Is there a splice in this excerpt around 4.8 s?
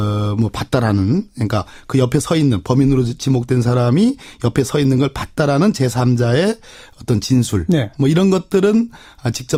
no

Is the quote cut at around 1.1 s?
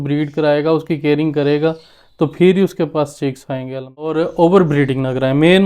no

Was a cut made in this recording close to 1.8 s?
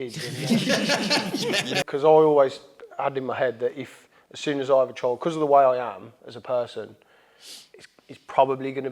yes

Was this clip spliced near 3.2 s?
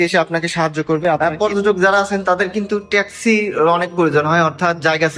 no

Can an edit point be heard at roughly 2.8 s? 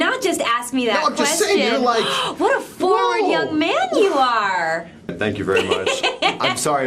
no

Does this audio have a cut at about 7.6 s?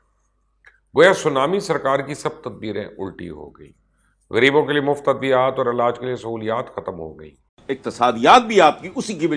yes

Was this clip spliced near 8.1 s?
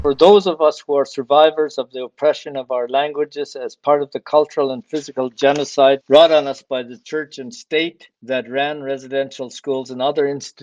yes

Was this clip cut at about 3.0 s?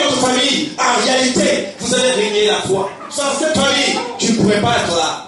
yes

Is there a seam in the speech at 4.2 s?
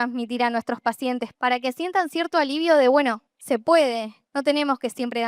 yes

